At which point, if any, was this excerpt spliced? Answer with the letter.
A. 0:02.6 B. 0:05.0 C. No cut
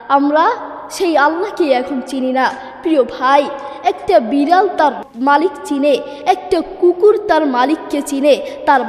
B